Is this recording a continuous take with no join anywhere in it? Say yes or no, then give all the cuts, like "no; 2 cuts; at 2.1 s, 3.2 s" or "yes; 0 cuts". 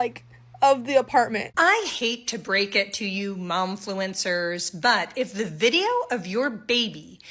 no; 1 cut; at 1.5 s